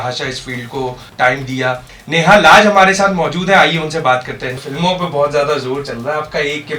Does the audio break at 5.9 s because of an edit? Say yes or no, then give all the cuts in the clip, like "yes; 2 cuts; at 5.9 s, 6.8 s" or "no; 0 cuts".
no; 3 cuts; at 1.1 s, 1.9 s, 4.6 s